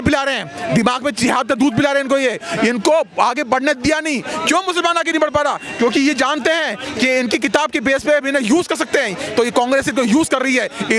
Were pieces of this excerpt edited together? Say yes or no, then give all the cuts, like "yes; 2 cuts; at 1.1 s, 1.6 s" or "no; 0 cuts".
no; 0 cuts